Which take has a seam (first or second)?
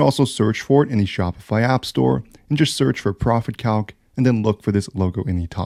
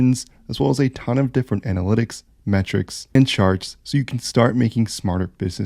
second